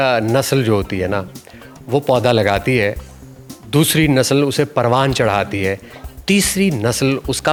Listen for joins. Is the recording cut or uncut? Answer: uncut